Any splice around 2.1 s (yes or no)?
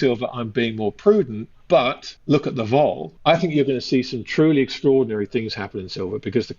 yes